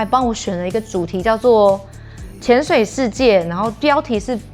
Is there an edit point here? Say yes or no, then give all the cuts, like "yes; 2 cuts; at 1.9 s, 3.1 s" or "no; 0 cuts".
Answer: no; 0 cuts